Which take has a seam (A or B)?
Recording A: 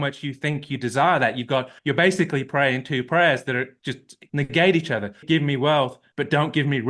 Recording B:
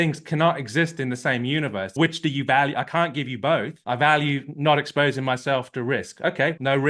B